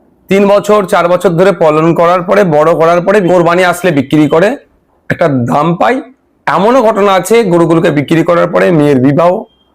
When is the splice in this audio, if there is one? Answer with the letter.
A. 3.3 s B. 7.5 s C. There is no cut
A